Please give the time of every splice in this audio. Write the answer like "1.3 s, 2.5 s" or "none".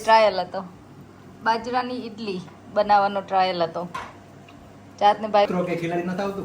5.5 s